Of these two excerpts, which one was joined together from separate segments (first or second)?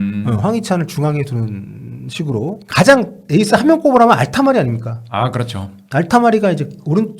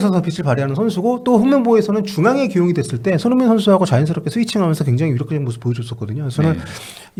first